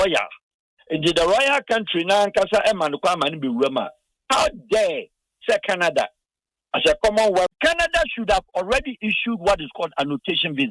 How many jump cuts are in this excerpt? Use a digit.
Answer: 1